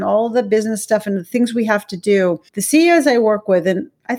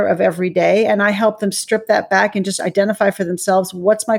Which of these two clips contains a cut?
first; 1 cut; at 2.5 s

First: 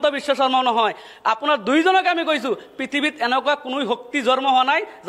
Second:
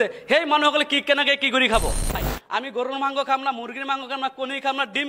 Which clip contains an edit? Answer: second; 1 cut; at 2.3 s

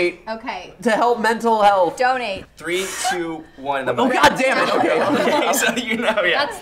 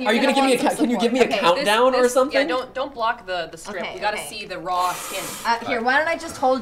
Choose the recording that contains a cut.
first; 1 cut; at 2.4 s

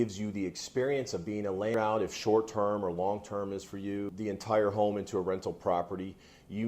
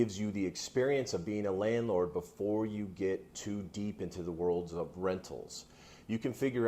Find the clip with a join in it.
first; 2 cuts; at 1.7 s, 4.3 s

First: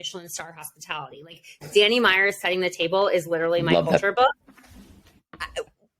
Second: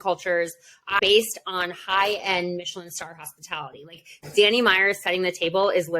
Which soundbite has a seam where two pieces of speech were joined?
second; 1 cut; at 1.0 s

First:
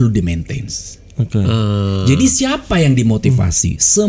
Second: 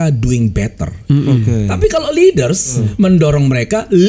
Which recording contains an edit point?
second; 1 cut; at 2.8 s

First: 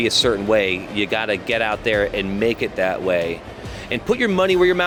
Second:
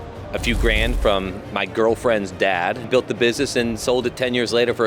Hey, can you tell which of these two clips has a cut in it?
second; 1 cut; at 2.9 s

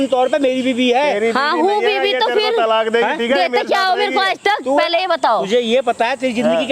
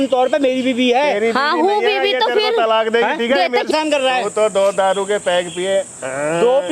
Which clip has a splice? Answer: second; 1 cut; at 3.7 s

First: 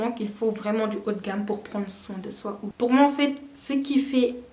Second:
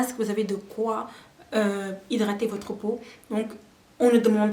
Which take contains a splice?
first; 1 cut; at 2.7 s

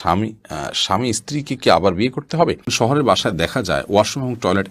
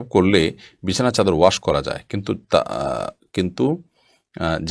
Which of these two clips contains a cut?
first; 1 cut; at 2.7 s

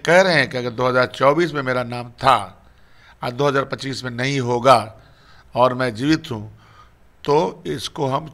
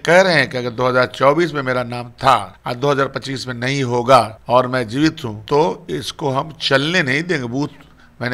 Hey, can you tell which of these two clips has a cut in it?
second; 3 cuts; at 2.6 s, 4.4 s, 5.3 s

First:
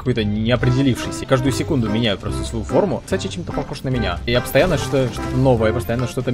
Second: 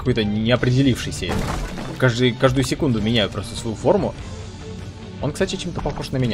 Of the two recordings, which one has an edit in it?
first; 3 cuts; at 1.2 s, 3.1 s, 4.3 s

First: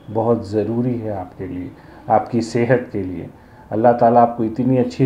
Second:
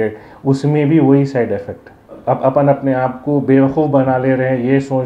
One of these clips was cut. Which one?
second; 1 cut; at 2.2 s

